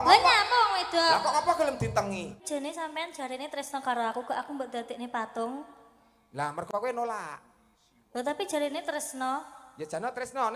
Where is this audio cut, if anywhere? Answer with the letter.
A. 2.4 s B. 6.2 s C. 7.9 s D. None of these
A